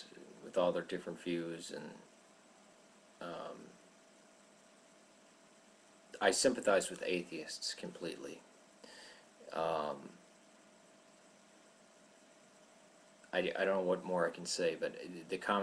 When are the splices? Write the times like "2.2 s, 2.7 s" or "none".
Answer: none